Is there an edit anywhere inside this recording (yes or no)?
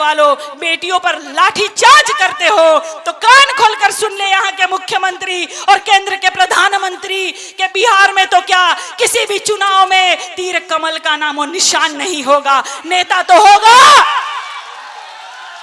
no